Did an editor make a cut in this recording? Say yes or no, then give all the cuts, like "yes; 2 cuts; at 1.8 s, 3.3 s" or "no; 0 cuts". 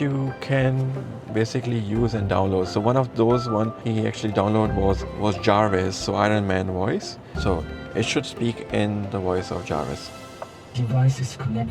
yes; 3 cuts; at 3.8 s, 5.1 s, 7.2 s